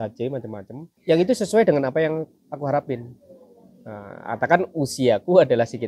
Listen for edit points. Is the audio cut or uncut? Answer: cut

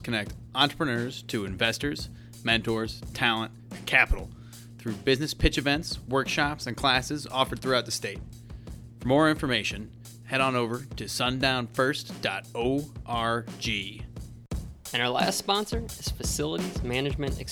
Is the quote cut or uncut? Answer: cut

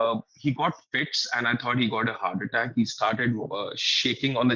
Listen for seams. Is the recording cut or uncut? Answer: uncut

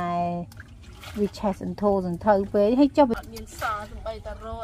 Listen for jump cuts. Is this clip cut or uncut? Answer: cut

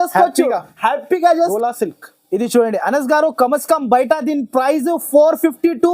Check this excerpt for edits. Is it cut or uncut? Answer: cut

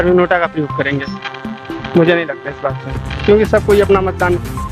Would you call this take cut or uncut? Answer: uncut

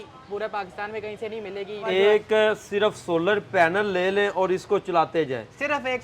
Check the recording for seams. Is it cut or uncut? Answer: cut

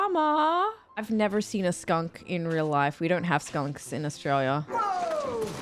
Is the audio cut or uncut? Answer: cut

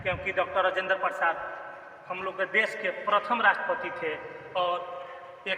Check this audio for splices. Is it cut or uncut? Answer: uncut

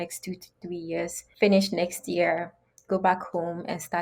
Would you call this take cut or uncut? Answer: cut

